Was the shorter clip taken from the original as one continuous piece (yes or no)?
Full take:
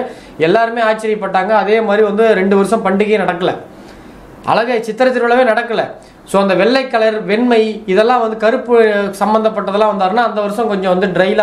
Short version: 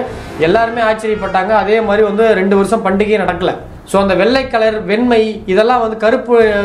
no